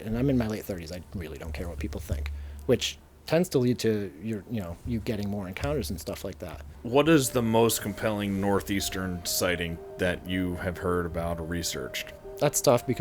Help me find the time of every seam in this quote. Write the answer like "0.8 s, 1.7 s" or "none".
6.6 s, 12.2 s